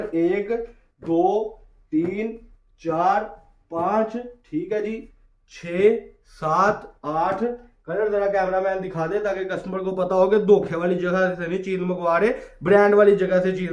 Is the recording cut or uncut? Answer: uncut